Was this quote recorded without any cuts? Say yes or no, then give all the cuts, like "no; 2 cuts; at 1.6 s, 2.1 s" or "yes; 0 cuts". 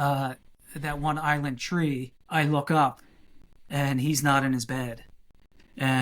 no; 1 cut; at 2.1 s